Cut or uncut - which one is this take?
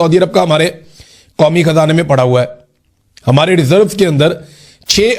uncut